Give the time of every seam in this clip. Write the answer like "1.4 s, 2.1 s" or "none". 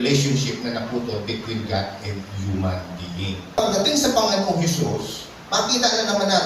3.6 s